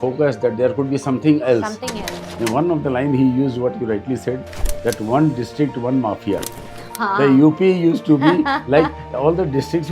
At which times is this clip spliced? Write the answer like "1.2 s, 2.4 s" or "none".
2.2 s